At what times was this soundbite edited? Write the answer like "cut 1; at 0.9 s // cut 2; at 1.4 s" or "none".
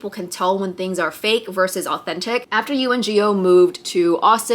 cut 1; at 2.4 s